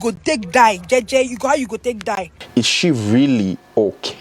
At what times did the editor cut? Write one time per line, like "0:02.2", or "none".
0:02.4